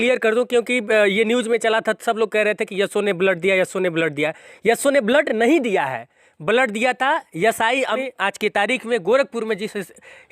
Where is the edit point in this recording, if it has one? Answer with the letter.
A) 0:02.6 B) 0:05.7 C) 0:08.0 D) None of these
C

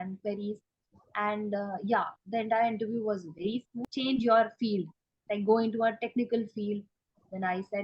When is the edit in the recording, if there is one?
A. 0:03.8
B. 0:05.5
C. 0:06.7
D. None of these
A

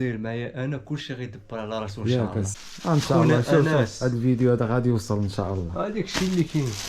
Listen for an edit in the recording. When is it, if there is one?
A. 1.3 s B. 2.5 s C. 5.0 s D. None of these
B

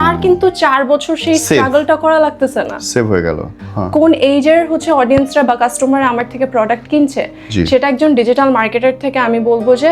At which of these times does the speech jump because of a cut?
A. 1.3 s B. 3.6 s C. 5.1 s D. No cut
B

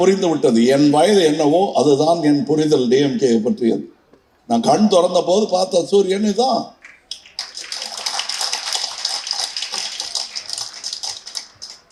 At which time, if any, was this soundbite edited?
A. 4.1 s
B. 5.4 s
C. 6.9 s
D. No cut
D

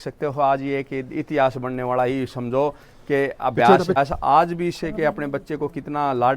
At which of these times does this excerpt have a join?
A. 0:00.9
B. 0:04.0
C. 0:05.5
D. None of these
B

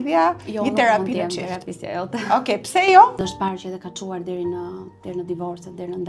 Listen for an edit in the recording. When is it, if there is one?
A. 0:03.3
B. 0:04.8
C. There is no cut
A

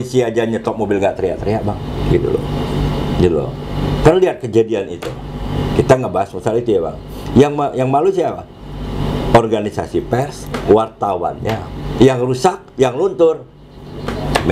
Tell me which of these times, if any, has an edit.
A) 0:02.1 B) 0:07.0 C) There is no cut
C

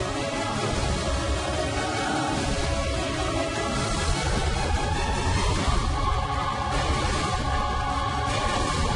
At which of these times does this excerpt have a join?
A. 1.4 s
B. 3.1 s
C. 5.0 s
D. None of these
D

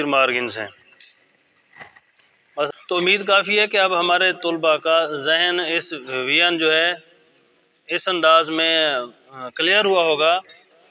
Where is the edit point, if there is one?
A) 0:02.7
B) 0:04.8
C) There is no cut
A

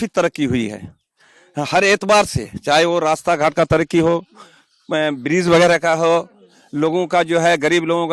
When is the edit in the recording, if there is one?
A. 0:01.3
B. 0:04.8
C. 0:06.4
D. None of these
D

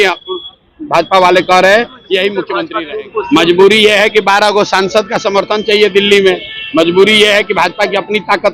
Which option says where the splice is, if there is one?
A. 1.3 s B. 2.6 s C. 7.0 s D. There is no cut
B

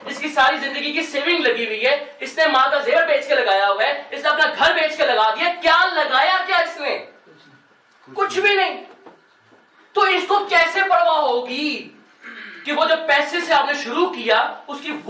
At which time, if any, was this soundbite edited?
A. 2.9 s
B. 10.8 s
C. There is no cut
C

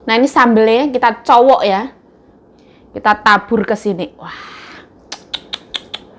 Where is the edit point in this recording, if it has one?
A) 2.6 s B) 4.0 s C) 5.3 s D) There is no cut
D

